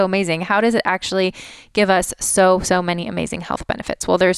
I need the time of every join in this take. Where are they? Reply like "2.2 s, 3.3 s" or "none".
none